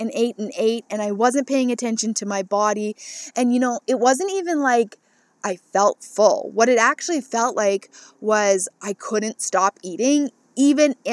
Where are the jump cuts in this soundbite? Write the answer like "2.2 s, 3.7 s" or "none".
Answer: none